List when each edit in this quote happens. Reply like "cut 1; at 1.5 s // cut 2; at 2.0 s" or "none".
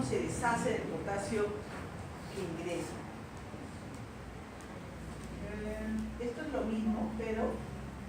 cut 1; at 2.2 s